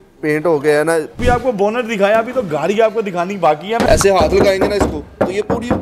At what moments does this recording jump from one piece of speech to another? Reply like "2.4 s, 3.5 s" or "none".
1.2 s, 3.9 s